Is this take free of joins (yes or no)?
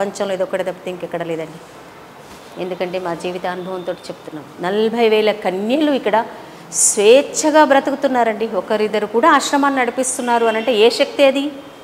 yes